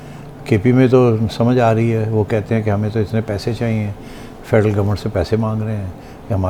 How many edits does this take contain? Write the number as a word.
zero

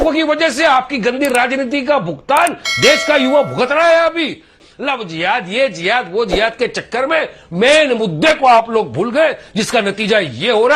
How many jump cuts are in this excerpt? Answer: one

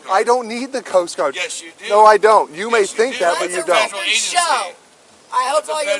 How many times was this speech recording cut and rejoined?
zero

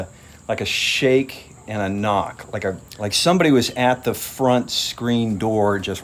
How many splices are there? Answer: zero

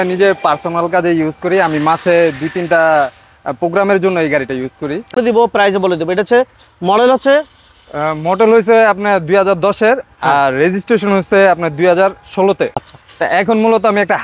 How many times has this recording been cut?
two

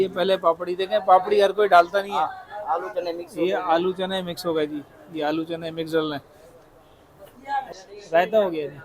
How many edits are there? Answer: one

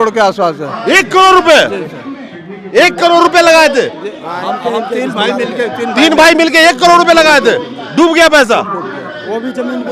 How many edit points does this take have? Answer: zero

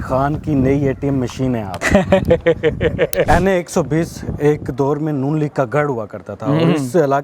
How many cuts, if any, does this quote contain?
two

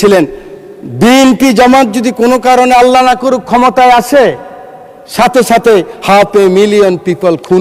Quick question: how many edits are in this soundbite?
zero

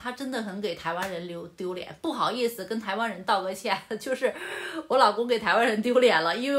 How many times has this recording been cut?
zero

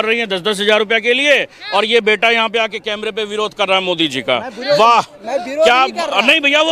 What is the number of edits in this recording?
zero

